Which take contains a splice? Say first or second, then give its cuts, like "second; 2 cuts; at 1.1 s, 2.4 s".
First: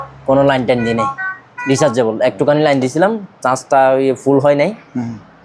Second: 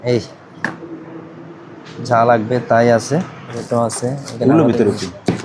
second; 1 cut; at 3.6 s